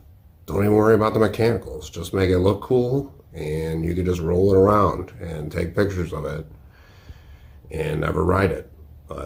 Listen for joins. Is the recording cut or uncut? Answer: uncut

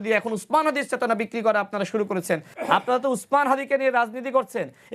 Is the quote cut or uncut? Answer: cut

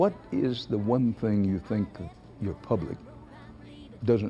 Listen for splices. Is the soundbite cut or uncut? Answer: uncut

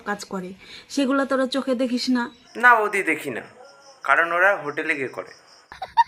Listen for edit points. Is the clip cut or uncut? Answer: uncut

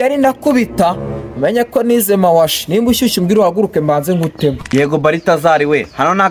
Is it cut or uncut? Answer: uncut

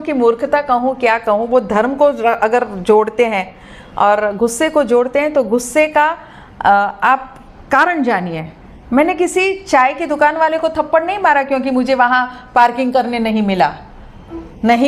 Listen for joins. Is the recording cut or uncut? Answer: uncut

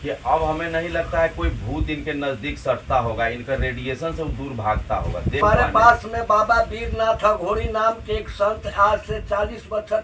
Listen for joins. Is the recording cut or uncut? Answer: cut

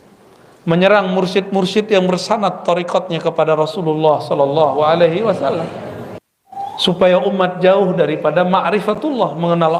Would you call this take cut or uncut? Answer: cut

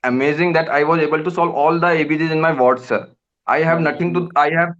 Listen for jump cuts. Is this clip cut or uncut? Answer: uncut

